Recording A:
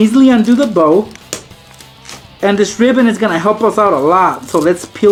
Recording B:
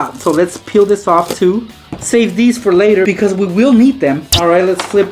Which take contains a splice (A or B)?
B